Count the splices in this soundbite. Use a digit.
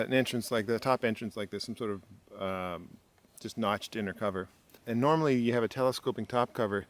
1